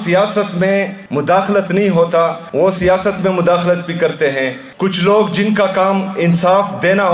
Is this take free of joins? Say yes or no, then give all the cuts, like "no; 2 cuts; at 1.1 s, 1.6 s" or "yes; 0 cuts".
no; 3 cuts; at 1.0 s, 2.4 s, 4.6 s